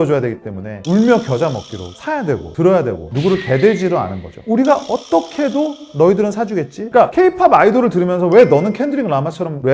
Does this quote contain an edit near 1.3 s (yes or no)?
no